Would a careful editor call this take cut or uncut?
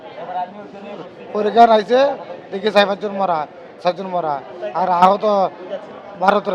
uncut